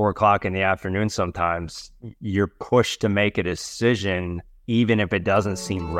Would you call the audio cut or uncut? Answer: uncut